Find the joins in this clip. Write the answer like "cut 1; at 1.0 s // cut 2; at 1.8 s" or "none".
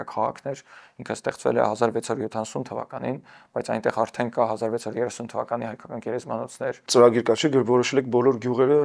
cut 1; at 6.8 s